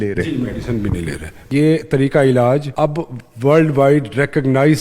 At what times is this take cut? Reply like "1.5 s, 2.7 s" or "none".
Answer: 1.5 s, 2.7 s